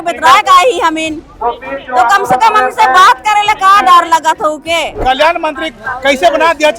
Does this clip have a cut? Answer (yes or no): yes